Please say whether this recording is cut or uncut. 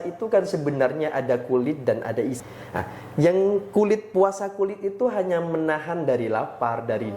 cut